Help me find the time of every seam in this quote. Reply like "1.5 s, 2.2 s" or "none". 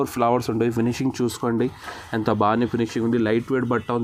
none